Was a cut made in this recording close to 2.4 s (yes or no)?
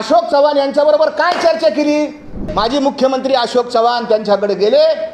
yes